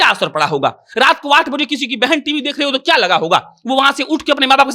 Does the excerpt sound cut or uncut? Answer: uncut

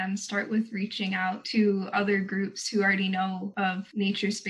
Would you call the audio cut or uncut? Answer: cut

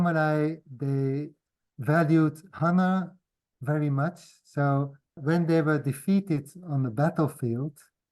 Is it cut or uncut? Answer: cut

